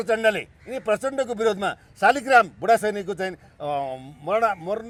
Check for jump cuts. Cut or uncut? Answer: uncut